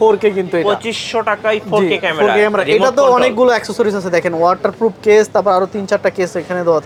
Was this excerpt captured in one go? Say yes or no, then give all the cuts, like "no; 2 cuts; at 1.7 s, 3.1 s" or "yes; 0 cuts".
yes; 0 cuts